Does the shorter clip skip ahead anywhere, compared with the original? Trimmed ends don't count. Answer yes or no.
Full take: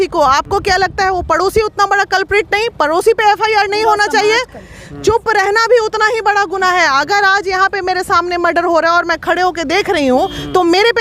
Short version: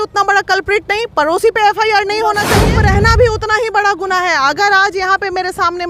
yes